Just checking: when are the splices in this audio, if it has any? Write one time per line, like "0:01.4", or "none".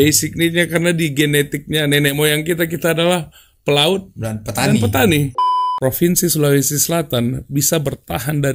0:05.3